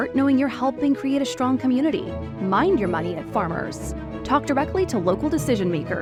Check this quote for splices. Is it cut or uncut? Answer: uncut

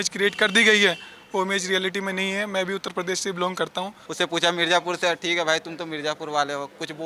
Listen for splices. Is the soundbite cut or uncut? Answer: cut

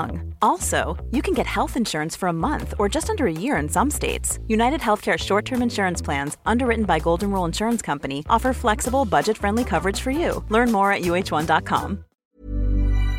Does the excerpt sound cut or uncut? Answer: cut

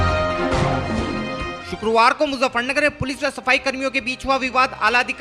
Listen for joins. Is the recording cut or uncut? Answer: uncut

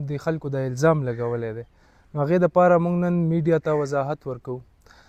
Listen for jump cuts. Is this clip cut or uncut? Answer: uncut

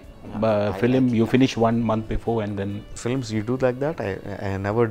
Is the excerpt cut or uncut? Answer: uncut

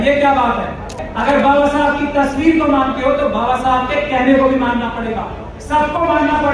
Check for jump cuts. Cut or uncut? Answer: cut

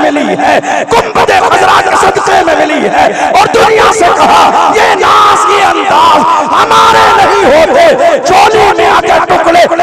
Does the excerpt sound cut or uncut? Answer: uncut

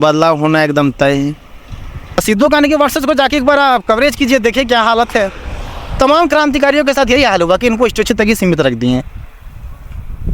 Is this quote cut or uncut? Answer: cut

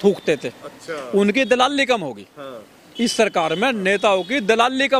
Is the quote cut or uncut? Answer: uncut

